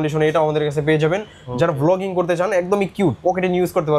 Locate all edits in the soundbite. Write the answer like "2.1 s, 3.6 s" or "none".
none